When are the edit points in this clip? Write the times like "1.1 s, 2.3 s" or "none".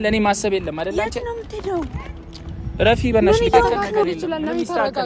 4.0 s

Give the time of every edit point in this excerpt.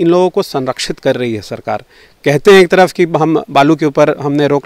none

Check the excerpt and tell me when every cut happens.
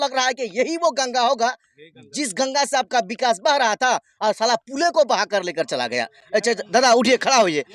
none

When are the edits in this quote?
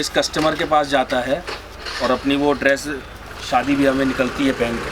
none

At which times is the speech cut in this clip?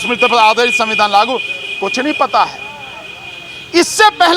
none

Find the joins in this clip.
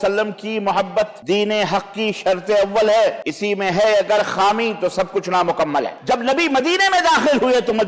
1.2 s, 3.3 s, 6.0 s

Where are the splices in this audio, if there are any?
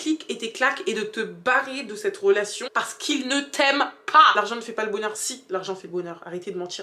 2.6 s, 4.4 s

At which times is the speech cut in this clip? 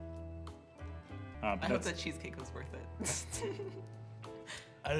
1.3 s

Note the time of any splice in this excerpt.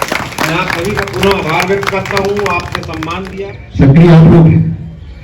3.2 s

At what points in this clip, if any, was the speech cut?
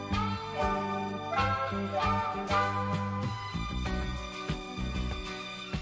3.1 s

